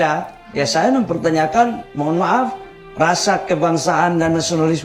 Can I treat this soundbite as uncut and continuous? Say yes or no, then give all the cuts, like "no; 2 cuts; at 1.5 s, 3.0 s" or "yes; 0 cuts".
yes; 0 cuts